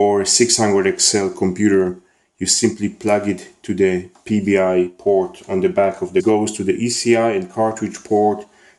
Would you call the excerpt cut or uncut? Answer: uncut